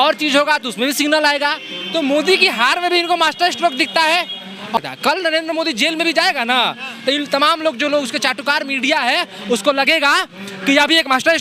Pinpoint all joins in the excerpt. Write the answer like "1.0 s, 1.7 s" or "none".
4.8 s